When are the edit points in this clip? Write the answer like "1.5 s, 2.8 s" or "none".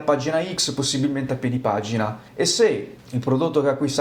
none